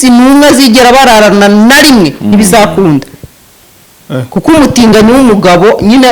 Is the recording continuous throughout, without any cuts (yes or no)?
yes